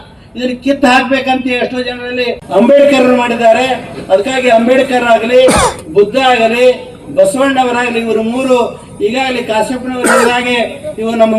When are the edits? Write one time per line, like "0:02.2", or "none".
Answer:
0:02.4

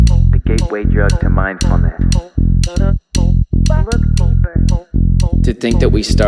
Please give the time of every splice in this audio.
none

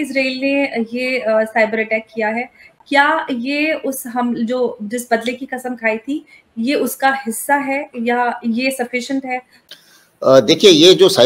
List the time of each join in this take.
none

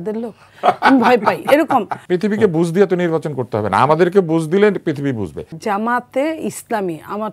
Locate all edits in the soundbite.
0:02.0
0:05.5

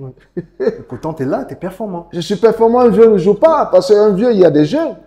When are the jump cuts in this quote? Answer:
none

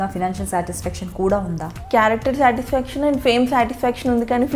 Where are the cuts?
0:01.7

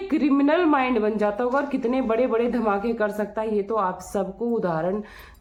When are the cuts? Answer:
none

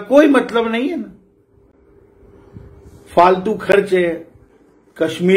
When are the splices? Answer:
none

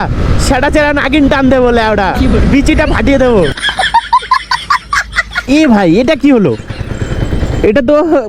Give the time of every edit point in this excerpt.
0:05.4

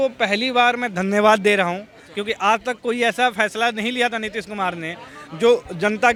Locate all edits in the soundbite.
none

